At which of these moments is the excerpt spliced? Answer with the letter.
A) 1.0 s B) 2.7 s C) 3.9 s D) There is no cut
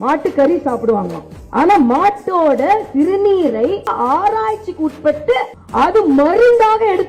C